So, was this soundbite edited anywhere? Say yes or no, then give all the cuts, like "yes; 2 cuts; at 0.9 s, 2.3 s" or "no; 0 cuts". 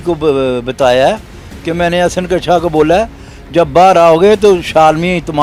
no; 0 cuts